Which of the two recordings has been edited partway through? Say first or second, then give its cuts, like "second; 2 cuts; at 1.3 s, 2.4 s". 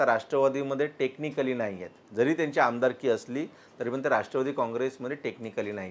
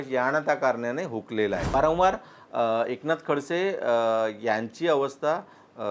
second; 1 cut; at 1.7 s